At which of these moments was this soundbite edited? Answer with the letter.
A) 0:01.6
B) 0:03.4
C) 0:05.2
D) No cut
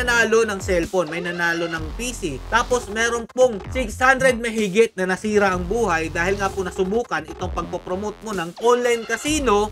D